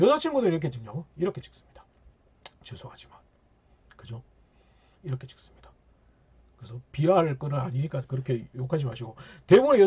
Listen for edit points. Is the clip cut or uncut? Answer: uncut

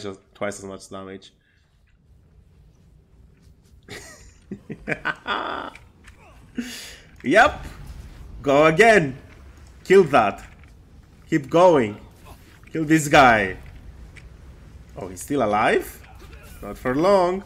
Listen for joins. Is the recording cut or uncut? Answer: uncut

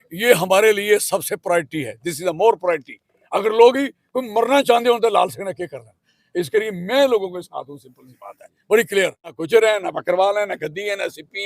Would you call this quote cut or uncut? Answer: cut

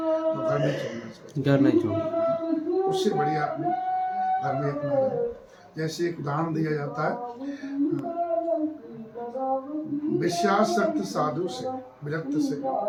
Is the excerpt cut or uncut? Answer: uncut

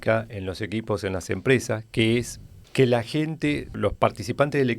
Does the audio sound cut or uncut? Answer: cut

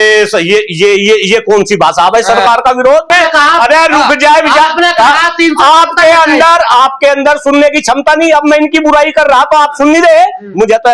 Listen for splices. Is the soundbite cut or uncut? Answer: cut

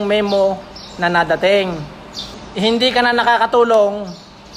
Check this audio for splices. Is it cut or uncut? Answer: cut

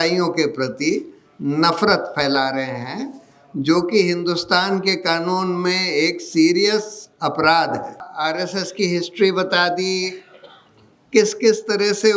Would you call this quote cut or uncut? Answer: cut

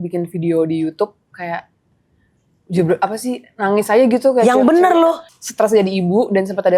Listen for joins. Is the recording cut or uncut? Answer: cut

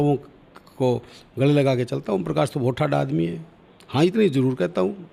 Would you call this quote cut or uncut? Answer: uncut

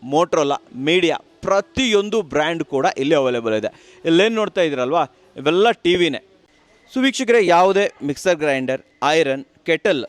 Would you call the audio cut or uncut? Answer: cut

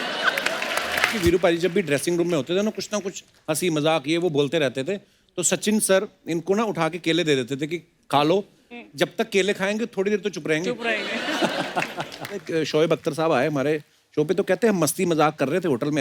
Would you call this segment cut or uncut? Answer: cut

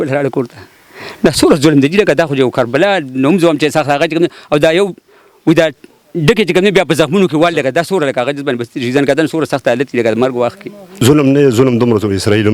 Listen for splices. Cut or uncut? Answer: cut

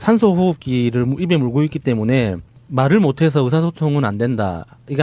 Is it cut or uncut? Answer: cut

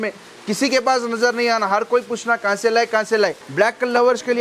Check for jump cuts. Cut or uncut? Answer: cut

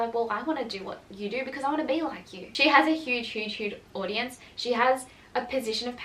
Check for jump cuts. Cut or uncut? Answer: cut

